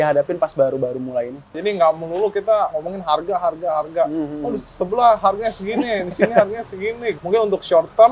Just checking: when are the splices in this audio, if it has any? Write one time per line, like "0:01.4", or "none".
0:01.6
0:02.8
0:07.1